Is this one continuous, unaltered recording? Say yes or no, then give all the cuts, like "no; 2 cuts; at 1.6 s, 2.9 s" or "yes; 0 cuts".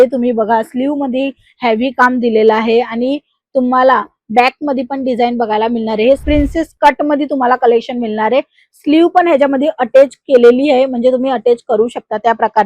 no; 1 cut; at 6.2 s